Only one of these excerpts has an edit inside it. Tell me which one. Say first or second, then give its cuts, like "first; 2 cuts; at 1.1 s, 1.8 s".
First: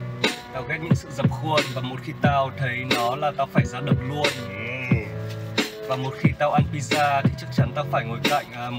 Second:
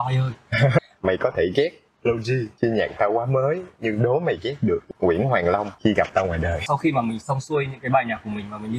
second; 5 cuts; at 0.8 s, 2.5 s, 4.8 s, 5.7 s, 6.6 s